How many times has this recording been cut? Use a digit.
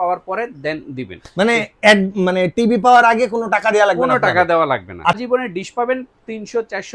1